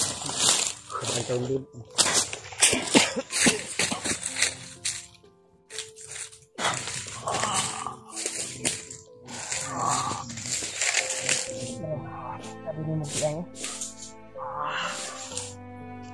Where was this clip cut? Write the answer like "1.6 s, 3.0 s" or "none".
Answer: none